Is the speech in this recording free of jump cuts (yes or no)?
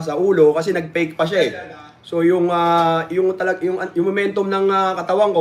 yes